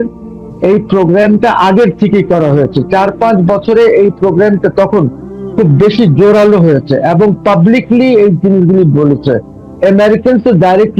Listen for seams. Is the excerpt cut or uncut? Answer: uncut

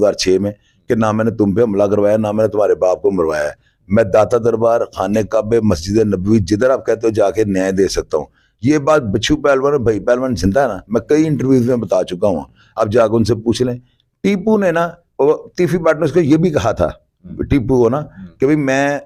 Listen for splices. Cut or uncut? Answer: uncut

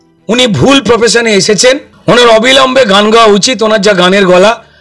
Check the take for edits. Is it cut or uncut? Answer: cut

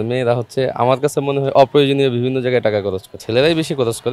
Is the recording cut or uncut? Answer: uncut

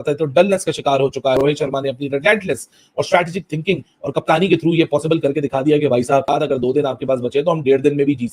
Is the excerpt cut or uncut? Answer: cut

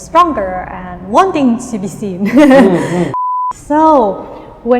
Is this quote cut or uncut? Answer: cut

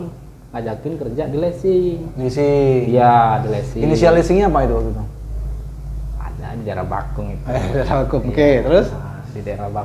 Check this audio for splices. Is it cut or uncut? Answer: uncut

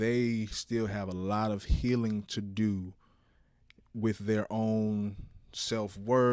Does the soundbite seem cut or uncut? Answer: uncut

